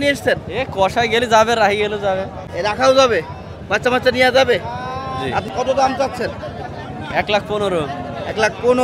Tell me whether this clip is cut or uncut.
uncut